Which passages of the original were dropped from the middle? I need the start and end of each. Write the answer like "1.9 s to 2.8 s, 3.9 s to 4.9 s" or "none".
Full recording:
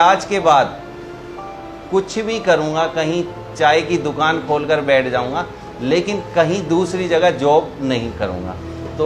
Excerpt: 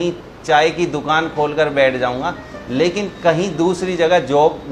none